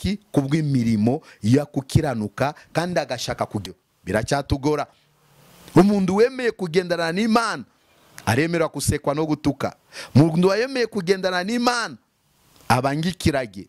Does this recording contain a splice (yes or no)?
yes